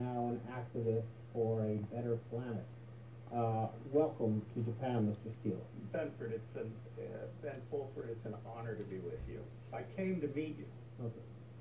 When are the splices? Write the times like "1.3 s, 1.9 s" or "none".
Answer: 9.4 s